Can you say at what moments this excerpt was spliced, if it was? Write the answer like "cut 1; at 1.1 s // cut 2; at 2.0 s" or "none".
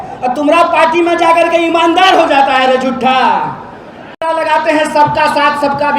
cut 1; at 4.2 s